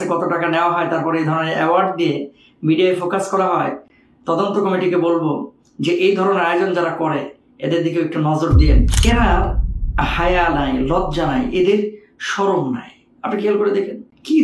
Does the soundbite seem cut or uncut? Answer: cut